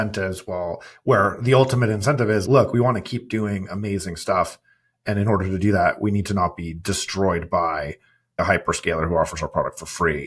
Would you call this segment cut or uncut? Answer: uncut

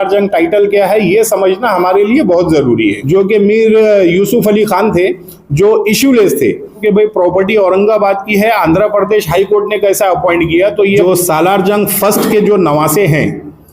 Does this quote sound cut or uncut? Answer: cut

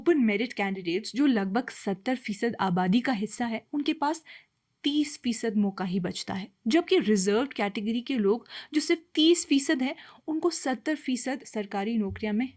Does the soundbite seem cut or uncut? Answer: uncut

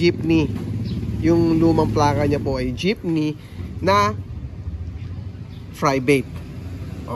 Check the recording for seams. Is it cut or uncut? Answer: uncut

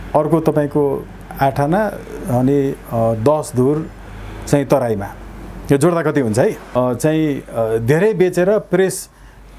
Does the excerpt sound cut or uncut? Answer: cut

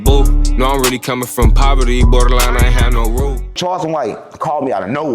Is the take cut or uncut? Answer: cut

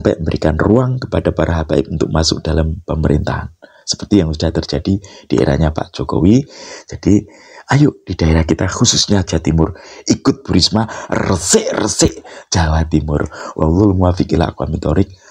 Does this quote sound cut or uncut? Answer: uncut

